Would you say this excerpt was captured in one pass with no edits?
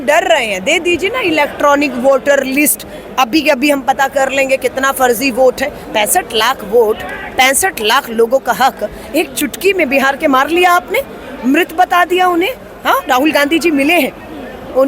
yes; 0 cuts

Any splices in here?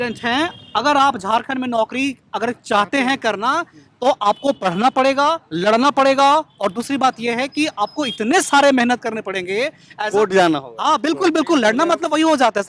no; 0 cuts

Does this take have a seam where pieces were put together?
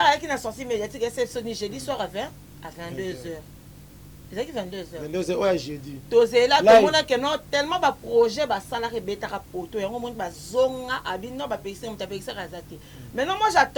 no; 0 cuts

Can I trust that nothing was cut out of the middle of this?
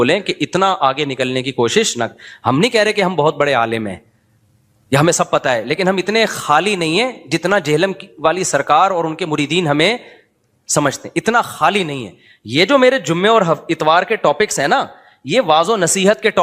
yes; 0 cuts

